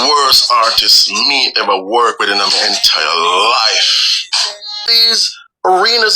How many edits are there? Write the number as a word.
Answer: one